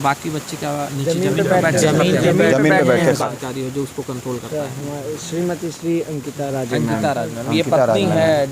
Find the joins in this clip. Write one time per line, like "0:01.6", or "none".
0:03.3